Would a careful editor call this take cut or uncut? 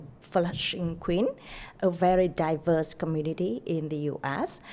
uncut